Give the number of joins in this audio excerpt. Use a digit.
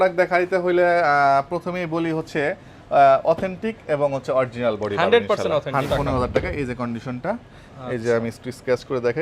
1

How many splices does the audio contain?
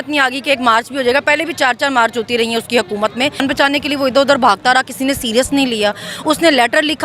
1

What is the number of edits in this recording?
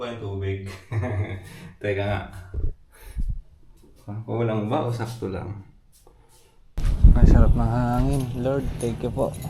1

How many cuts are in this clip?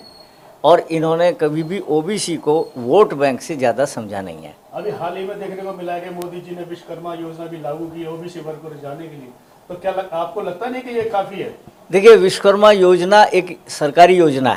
0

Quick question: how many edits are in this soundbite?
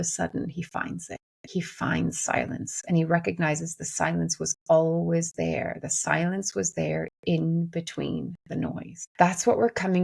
1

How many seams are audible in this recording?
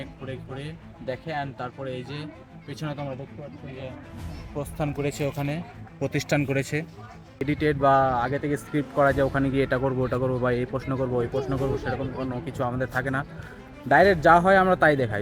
1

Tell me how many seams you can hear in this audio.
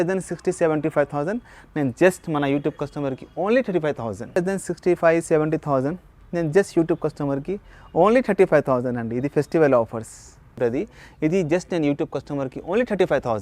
2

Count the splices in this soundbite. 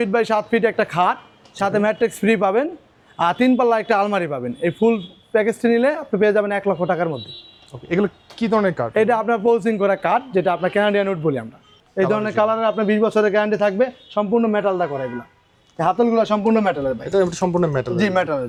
0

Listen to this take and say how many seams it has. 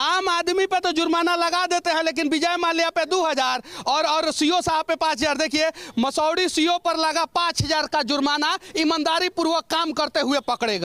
0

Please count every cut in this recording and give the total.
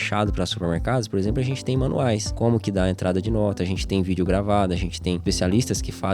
2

